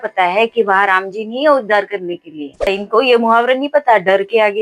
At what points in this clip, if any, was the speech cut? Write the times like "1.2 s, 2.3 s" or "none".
2.7 s